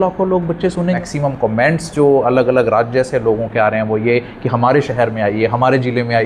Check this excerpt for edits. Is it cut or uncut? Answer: cut